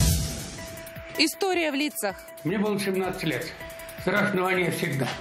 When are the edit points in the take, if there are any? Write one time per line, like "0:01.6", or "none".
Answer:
0:01.0